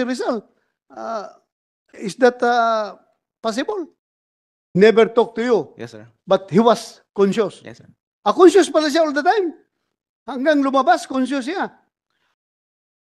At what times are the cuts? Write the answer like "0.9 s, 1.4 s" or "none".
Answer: 4.8 s